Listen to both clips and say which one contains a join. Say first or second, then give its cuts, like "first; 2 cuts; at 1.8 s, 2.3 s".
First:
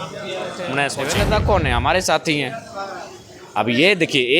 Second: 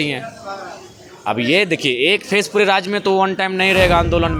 first; 1 cut; at 1.0 s